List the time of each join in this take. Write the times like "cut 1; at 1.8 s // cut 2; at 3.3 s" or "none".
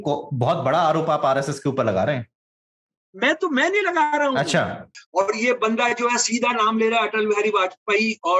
cut 1; at 4.9 s

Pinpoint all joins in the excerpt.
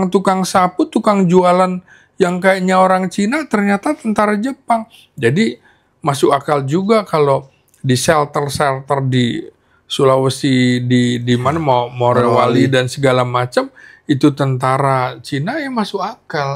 none

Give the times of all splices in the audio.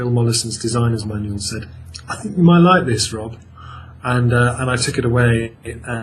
none

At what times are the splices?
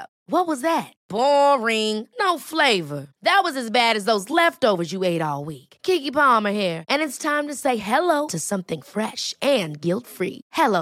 none

